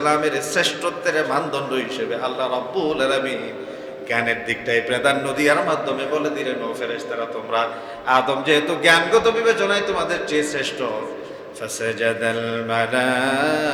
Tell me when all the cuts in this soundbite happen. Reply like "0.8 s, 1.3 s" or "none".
none

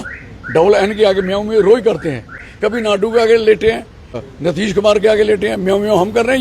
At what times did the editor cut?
2.5 s, 4.2 s

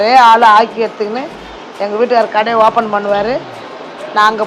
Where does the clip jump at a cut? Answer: none

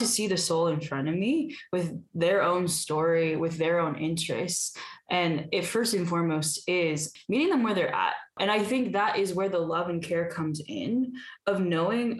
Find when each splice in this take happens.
7.1 s, 8.3 s

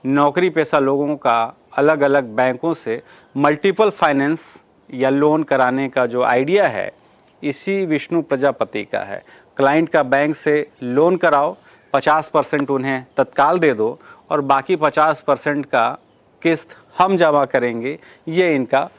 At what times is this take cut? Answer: none

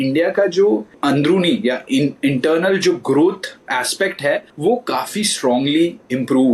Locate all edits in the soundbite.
0.9 s, 3.5 s, 4.5 s

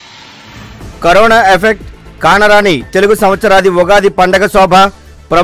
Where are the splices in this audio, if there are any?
0.9 s

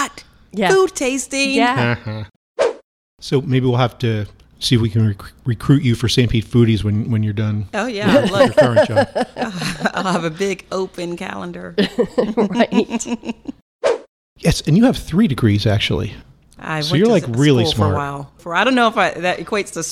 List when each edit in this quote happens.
2.6 s, 13.9 s

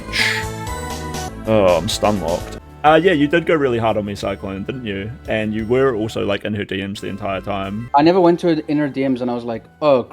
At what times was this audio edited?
1.3 s, 2.5 s, 7.7 s

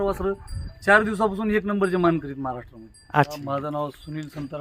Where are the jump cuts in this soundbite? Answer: 3.3 s

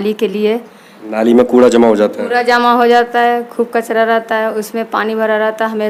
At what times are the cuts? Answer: none

